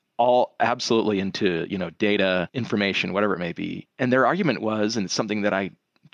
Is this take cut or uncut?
cut